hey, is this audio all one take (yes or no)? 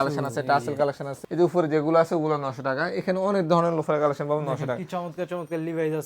no